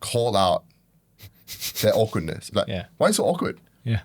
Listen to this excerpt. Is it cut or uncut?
cut